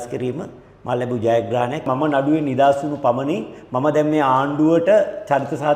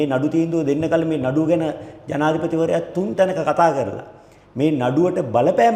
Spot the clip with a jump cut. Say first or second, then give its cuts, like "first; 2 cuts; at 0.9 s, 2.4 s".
first; 1 cut; at 1.9 s